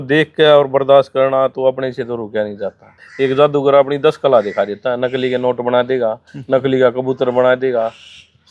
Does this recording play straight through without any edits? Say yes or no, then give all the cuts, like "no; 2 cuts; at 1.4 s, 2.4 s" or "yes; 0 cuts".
no; 1 cut; at 3.0 s